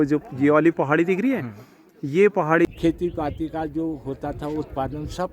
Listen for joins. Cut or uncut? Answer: cut